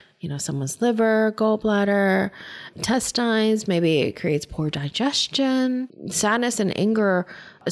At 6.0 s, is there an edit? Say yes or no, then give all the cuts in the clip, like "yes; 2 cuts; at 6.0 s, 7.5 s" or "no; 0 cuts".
yes; 2 cuts; at 2.6 s, 6.0 s